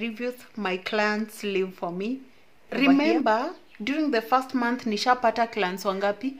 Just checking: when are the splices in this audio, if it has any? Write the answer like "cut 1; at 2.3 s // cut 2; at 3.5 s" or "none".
cut 1; at 2.6 s